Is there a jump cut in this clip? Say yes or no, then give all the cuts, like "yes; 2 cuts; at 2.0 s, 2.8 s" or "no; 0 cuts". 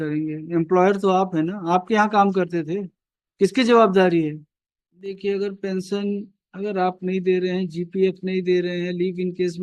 yes; 1 cut; at 5.2 s